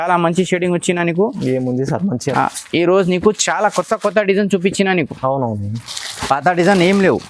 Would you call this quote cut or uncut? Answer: uncut